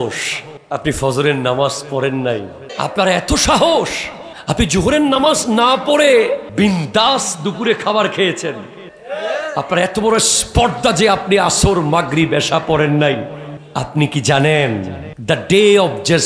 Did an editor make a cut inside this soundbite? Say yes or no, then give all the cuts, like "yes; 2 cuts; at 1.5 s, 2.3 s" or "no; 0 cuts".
no; 0 cuts